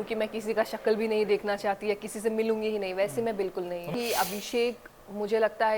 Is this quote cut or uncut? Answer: cut